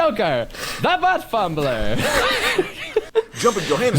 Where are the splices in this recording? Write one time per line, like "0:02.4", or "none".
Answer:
0:03.1

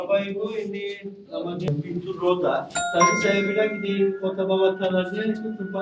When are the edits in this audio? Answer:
none

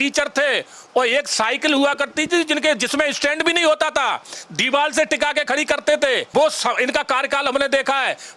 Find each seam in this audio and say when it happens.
0:06.2

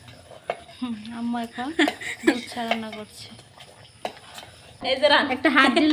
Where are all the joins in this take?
0:04.7

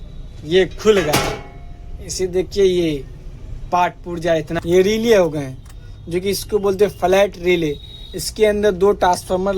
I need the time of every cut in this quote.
0:04.6

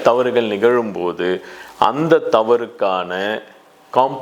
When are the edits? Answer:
none

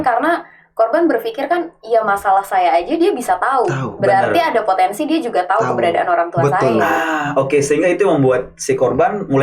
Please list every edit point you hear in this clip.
none

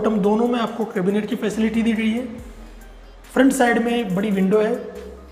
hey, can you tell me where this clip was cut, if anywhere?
none

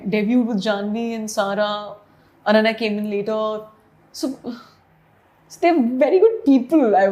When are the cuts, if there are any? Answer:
none

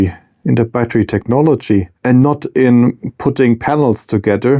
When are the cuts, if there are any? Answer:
0:01.9

